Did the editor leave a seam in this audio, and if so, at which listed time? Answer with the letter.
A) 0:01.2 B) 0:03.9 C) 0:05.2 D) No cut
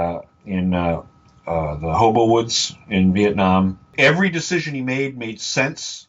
B